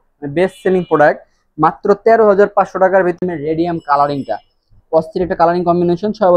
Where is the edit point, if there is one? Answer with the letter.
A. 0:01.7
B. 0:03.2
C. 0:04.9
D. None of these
B